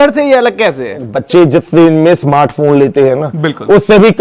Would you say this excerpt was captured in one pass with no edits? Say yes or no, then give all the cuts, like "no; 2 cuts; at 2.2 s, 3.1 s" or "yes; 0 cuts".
no; 1 cut; at 1.1 s